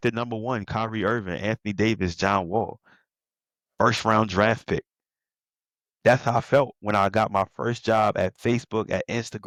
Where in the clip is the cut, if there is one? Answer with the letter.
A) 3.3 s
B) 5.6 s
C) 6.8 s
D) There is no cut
D